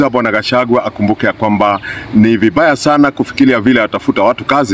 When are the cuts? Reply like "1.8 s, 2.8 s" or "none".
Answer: 1.9 s